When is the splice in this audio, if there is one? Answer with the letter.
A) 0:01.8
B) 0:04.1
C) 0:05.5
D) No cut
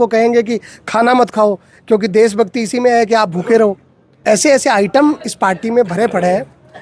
B